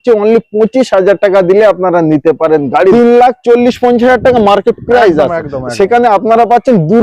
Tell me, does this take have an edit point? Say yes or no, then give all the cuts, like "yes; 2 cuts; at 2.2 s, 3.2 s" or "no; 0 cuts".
yes; 1 cut; at 2.9 s